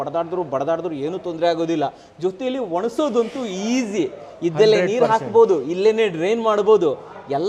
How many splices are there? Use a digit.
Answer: 0